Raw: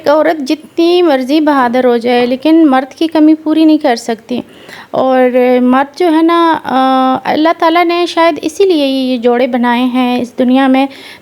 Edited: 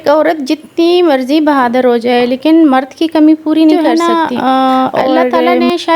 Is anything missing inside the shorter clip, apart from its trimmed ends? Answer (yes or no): yes